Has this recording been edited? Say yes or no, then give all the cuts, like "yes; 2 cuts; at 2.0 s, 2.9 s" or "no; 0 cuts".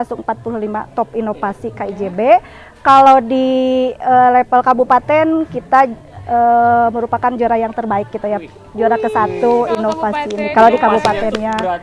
no; 0 cuts